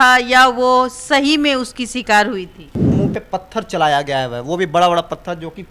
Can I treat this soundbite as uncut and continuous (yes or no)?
no